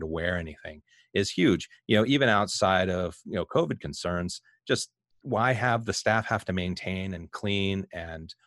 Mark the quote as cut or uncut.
uncut